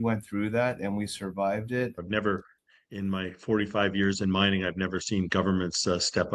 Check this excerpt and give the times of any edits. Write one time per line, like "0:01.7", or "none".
0:02.0